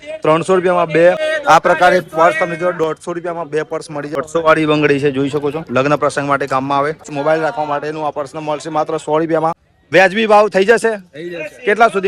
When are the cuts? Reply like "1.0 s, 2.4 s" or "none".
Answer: 1.2 s, 4.2 s, 7.1 s, 9.7 s